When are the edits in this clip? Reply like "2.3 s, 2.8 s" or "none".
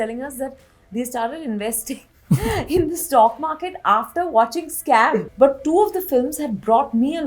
5.2 s